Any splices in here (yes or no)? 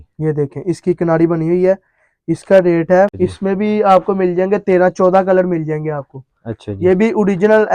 yes